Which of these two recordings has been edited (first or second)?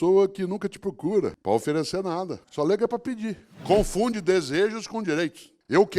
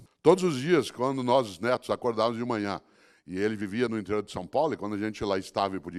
first